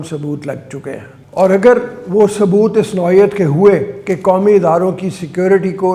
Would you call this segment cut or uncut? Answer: uncut